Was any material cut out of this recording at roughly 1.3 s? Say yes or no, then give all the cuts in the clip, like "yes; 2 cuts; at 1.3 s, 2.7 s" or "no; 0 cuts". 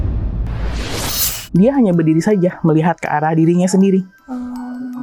no; 0 cuts